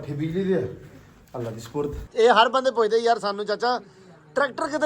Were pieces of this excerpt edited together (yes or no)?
yes